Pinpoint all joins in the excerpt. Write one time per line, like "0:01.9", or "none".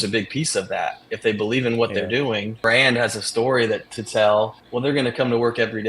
0:02.6
0:04.6